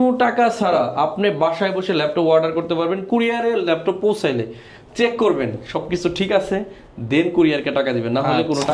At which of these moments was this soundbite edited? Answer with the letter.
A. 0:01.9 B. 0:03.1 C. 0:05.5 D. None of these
D